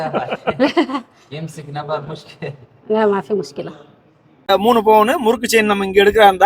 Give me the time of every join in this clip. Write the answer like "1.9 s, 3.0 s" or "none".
4.5 s